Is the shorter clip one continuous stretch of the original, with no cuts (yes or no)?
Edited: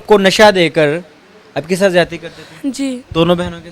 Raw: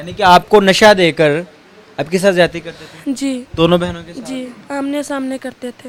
yes